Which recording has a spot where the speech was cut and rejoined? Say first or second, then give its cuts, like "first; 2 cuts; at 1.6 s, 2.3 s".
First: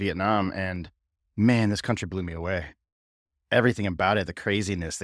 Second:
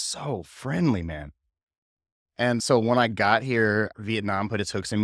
second; 2 cuts; at 2.6 s, 3.9 s